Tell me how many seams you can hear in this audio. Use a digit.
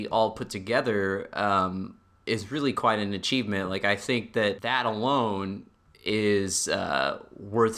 1